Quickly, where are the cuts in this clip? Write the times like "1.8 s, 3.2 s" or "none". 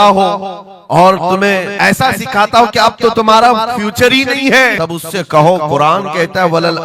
1.7 s, 4.7 s